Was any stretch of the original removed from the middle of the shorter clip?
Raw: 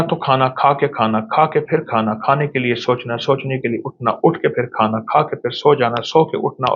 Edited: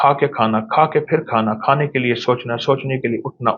no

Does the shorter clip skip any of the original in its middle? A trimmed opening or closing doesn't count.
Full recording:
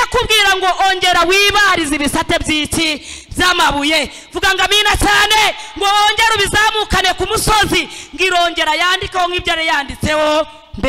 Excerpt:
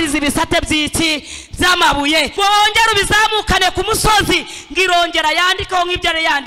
yes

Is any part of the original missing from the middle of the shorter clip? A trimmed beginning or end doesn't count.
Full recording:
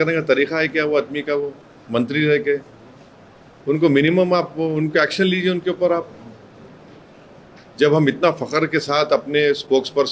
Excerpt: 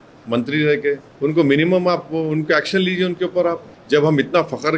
yes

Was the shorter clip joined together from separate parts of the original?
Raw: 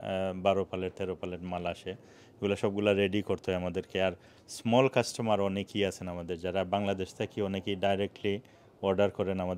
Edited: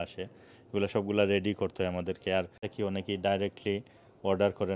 yes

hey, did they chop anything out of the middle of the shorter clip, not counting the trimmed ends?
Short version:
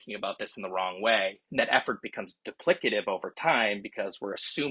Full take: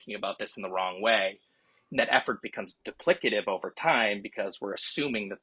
yes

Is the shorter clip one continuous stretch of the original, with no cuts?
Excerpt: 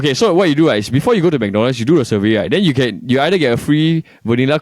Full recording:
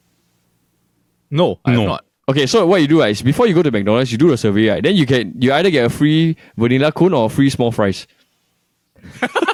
yes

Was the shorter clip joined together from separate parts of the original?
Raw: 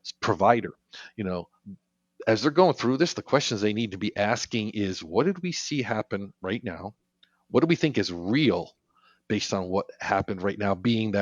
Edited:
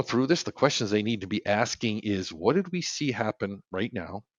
no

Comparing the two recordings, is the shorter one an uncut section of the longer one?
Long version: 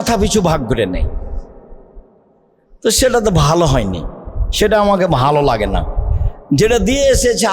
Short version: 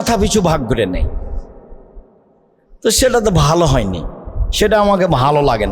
yes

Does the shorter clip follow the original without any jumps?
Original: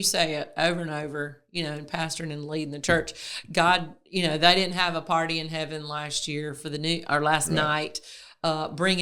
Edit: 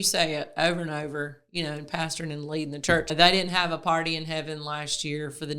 no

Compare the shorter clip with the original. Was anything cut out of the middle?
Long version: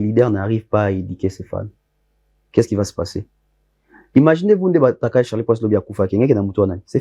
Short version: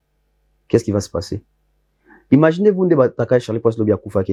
no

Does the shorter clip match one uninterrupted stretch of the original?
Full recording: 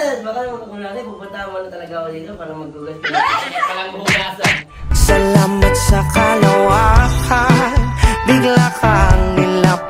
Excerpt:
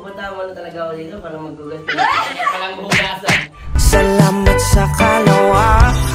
yes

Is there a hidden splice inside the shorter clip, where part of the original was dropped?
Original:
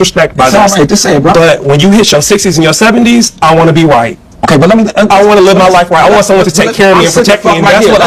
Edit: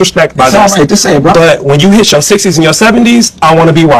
no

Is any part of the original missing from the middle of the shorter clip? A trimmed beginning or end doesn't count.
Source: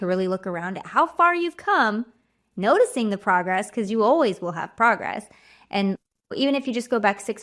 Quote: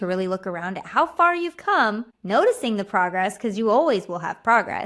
yes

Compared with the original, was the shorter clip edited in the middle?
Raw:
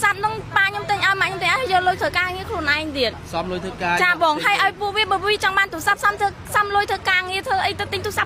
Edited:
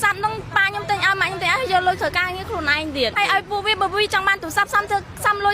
yes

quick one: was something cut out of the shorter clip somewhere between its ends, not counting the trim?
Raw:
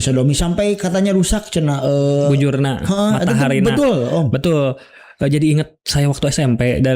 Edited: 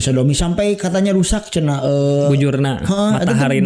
no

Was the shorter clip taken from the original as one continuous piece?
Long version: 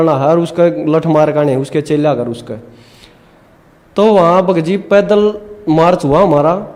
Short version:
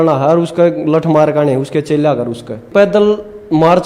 no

